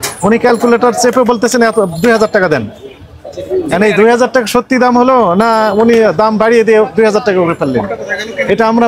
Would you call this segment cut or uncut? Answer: uncut